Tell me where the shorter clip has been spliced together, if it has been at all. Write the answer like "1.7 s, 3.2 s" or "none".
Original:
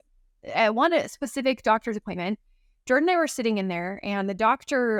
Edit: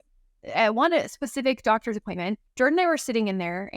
2.4 s